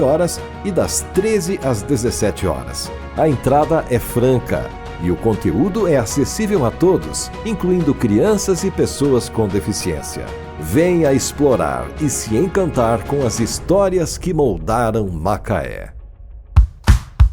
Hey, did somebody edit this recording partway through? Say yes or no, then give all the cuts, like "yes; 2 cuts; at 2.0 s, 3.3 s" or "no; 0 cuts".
yes; 1 cut; at 16.4 s